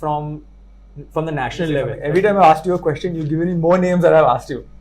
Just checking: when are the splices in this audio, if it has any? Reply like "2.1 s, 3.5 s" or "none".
1.9 s